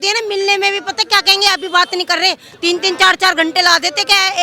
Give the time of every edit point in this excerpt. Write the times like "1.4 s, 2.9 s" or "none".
none